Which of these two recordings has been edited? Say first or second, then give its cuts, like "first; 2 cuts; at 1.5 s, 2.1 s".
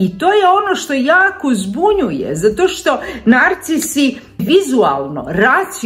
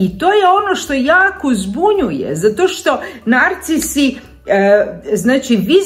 first; 1 cut; at 4.4 s